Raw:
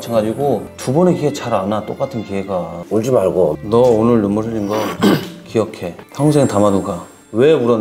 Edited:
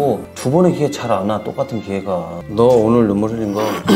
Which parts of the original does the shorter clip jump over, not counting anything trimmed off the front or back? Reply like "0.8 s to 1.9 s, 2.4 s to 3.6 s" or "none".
2.9 s to 3.6 s